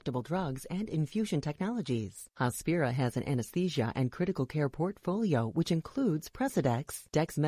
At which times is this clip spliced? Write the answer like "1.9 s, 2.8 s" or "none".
2.2 s